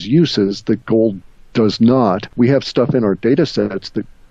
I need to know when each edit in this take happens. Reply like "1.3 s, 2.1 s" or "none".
2.3 s